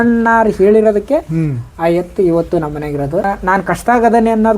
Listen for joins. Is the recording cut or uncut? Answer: cut